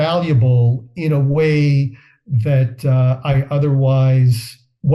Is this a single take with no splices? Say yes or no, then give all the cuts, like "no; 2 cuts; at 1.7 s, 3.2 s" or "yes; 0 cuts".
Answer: yes; 0 cuts